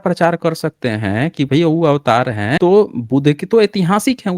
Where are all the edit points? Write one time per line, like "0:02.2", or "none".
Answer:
0:02.5